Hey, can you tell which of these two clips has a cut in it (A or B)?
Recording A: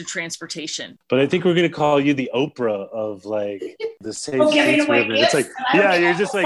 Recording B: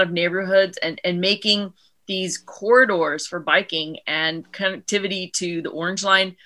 A